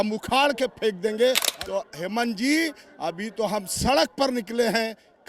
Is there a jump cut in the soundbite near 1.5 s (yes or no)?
yes